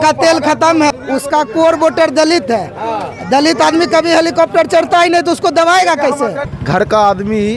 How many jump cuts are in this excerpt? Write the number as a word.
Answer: two